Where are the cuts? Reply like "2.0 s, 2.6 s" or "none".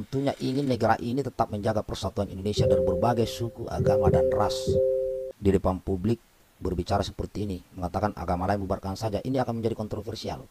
5.2 s